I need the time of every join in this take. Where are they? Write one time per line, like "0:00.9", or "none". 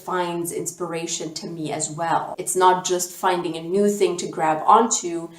0:02.4